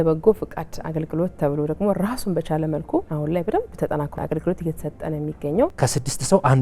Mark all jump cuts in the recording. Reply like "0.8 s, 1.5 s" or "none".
3.1 s, 4.1 s, 5.7 s